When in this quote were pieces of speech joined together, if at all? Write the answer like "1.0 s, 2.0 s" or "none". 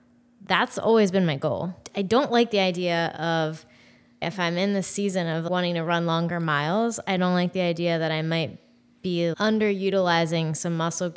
1.8 s, 4.2 s, 5.4 s, 9.4 s